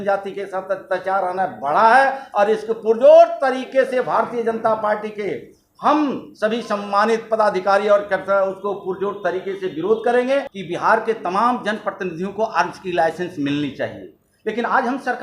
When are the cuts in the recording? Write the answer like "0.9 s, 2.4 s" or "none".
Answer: 10.6 s